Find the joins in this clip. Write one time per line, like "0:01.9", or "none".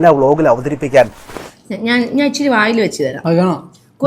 0:01.2